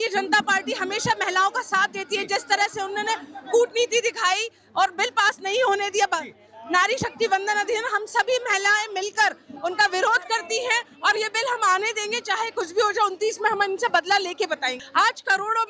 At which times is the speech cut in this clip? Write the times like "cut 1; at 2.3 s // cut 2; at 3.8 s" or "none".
cut 1; at 14.8 s